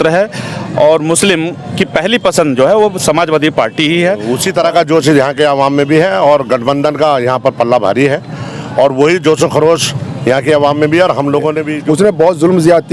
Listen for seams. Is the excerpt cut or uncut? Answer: cut